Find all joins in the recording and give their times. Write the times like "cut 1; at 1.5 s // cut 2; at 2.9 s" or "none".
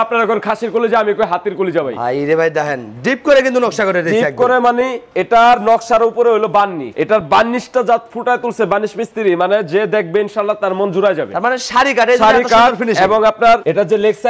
none